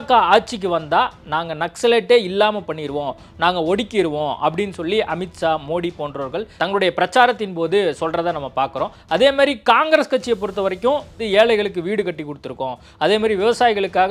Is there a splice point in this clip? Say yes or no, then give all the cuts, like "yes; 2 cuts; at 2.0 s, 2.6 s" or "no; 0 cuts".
yes; 1 cut; at 11.2 s